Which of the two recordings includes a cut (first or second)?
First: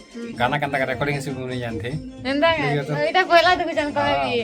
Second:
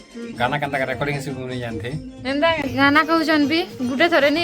second